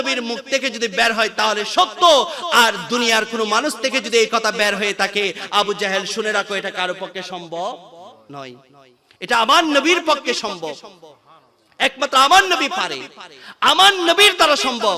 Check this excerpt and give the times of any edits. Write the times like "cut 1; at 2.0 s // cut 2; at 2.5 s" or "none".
none